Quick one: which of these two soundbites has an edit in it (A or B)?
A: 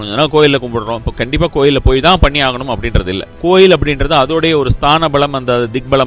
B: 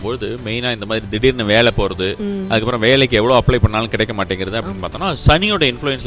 A